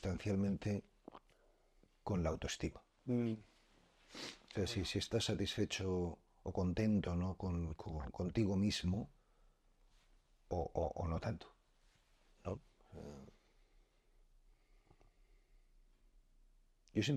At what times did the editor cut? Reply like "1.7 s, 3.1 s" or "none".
none